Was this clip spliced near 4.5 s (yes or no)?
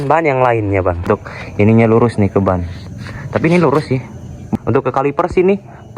yes